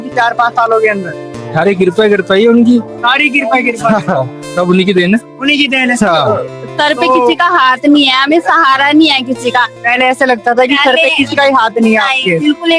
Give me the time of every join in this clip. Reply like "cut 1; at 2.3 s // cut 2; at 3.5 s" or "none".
cut 1; at 6.3 s